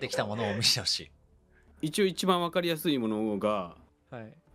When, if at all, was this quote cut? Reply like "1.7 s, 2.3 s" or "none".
1.6 s